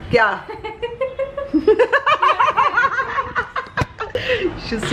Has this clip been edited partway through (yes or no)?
yes